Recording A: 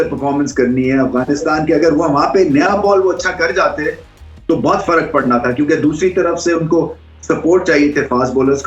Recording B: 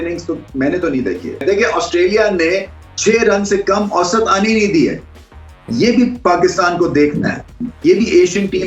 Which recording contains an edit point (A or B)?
B